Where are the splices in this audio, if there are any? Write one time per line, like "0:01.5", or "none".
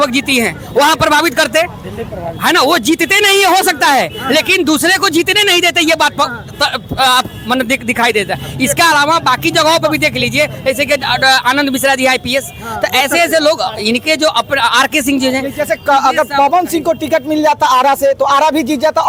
none